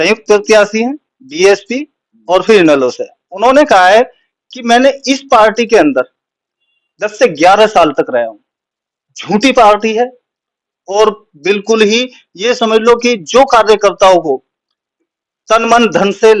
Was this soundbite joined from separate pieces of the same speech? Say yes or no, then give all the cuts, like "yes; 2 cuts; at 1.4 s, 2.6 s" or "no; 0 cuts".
no; 0 cuts